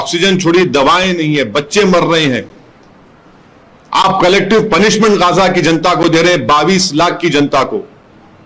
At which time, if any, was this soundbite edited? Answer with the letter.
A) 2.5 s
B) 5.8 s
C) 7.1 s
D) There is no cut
D